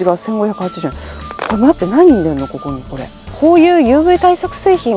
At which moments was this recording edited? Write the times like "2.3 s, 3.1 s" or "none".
3.2 s